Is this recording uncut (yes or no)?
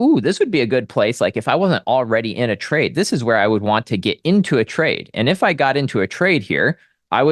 yes